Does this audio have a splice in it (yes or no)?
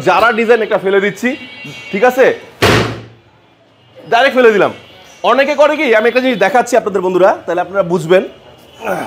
no